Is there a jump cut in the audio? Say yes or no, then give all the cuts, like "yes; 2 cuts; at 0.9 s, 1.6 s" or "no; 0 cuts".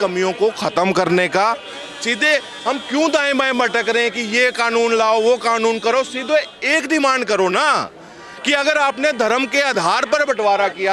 no; 0 cuts